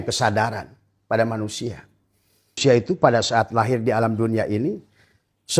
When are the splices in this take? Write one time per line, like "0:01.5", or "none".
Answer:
0:02.6